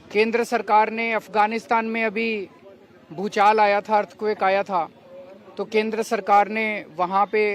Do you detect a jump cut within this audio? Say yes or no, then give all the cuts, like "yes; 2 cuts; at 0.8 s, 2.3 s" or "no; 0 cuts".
no; 0 cuts